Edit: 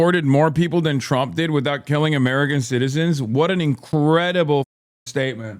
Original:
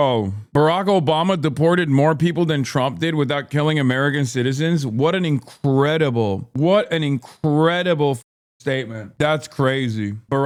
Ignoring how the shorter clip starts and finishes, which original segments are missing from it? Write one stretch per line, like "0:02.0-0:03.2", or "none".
0:05.5-0:07.3

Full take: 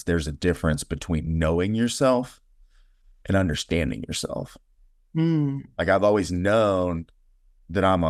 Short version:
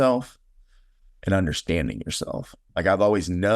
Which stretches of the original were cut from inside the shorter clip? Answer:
0:04.6-0:05.6

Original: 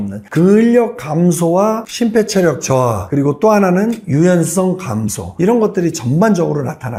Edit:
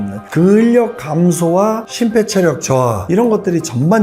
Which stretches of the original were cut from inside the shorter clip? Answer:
0:03.0-0:05.3

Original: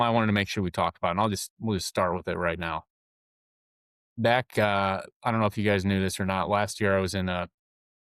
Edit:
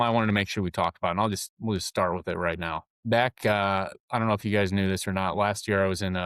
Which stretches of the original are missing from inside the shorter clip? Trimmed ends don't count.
0:02.9-0:04.0

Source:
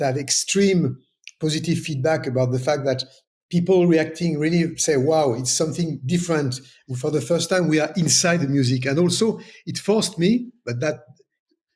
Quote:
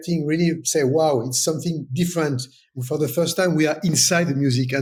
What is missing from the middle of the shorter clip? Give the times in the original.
none

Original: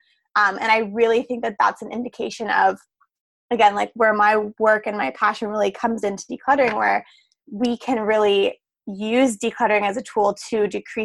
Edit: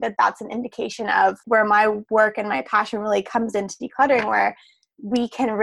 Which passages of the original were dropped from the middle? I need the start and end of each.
0:02.8-0:03.9

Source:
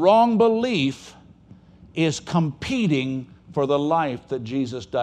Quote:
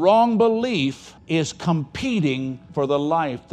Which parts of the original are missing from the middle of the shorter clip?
0:01.1-0:01.8
0:03.3-0:03.4

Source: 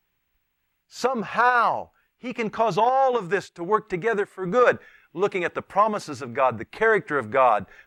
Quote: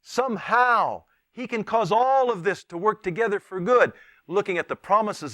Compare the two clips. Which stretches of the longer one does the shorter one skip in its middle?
none

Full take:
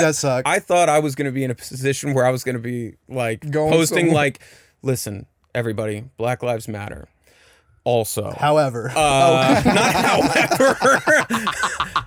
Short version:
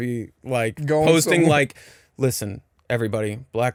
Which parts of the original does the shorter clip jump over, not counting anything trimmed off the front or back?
none

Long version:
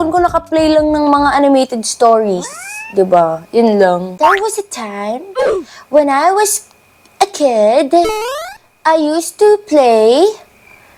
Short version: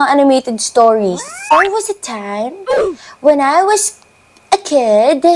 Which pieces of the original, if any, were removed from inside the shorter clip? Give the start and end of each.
0:02.7-0:04.2

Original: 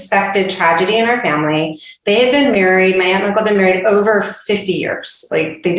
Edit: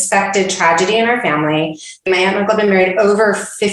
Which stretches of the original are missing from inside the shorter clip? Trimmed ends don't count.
0:02.1-0:02.9

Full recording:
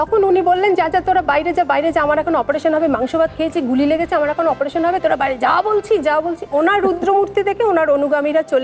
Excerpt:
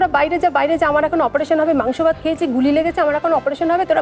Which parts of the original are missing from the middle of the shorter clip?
none

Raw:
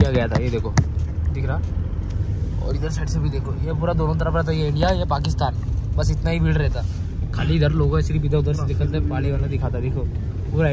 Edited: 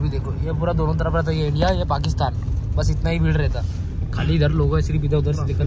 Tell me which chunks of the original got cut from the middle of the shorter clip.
none

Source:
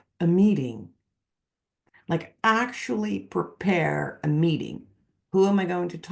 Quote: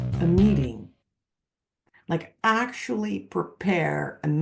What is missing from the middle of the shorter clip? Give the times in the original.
none

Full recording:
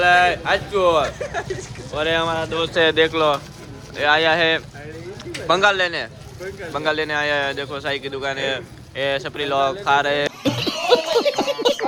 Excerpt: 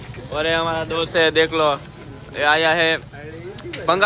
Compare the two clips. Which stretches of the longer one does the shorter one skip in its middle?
none

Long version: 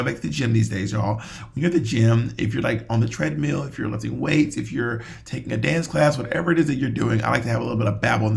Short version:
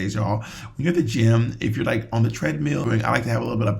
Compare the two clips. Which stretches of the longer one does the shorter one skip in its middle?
0:03.6-0:07.1

